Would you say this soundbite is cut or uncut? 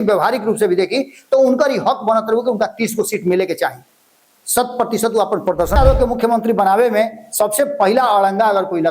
cut